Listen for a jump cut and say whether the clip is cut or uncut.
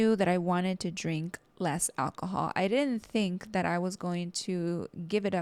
uncut